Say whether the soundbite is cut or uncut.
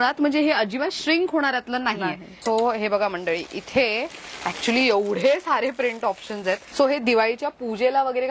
cut